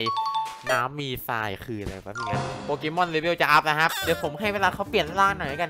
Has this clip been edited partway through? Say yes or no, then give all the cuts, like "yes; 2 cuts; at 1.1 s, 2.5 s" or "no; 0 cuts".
yes; 2 cuts; at 2.6 s, 4.0 s